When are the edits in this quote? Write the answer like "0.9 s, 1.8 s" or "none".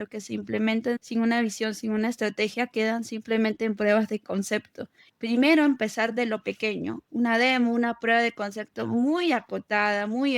1.0 s, 5.0 s, 7.0 s